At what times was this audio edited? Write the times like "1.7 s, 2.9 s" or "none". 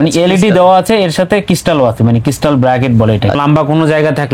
3.4 s